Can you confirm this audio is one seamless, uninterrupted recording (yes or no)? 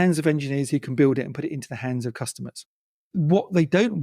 no